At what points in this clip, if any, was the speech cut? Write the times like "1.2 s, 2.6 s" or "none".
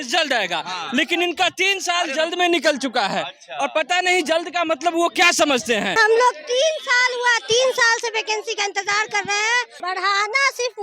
6.0 s, 9.7 s